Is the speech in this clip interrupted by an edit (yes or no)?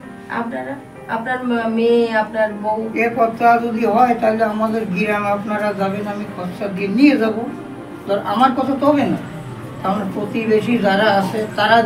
no